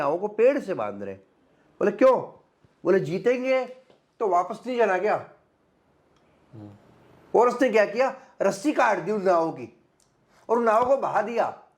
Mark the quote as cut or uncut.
uncut